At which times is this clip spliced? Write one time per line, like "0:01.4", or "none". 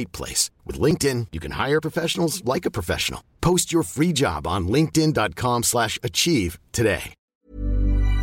0:07.2